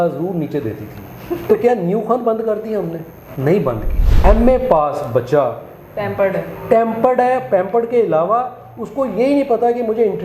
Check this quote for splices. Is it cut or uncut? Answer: cut